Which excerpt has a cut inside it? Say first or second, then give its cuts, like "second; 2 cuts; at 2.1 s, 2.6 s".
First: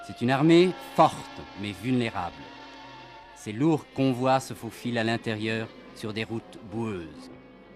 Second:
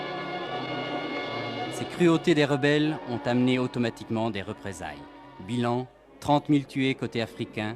second; 1 cut; at 2.1 s